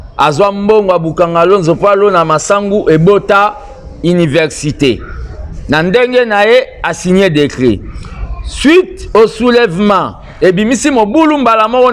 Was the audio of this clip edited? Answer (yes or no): no